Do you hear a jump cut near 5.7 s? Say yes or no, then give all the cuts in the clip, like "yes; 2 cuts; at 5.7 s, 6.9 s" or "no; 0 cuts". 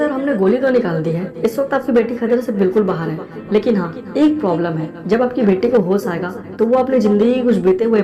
no; 0 cuts